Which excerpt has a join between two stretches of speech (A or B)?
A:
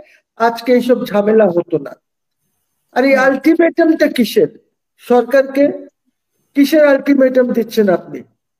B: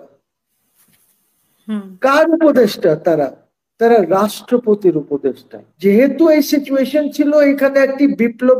B